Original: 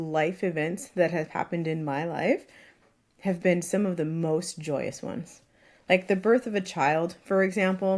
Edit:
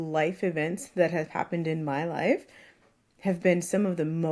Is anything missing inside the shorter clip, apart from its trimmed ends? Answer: no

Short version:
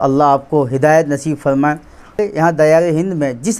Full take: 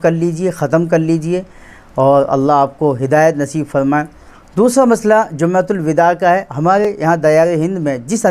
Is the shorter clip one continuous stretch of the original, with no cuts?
no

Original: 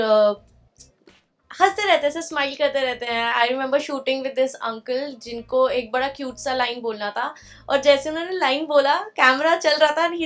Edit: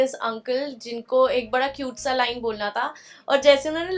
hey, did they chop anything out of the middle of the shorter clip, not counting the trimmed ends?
no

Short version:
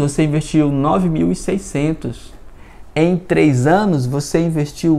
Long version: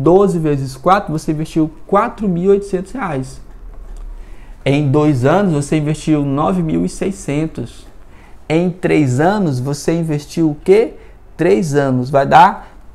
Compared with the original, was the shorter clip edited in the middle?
no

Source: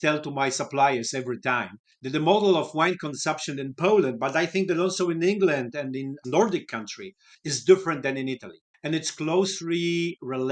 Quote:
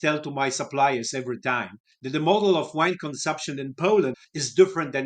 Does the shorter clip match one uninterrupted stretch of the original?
no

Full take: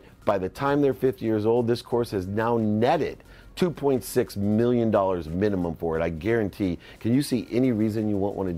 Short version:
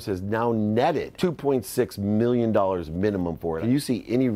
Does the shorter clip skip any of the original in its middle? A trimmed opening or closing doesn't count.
yes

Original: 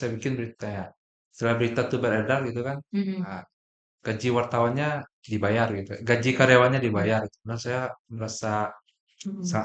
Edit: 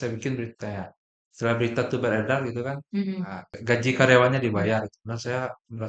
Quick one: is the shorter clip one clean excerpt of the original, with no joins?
no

